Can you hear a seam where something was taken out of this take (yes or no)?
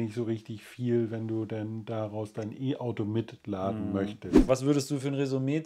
yes